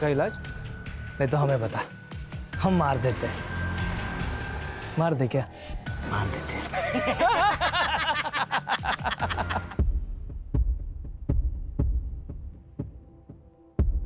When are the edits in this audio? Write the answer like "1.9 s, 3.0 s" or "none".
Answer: 9.7 s